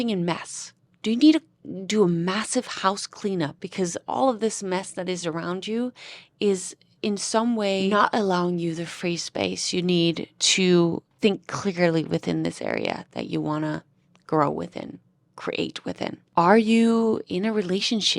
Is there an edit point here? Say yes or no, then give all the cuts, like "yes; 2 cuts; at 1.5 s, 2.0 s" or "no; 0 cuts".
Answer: yes; 4 cuts; at 3.6 s, 7.9 s, 11.1 s, 16.2 s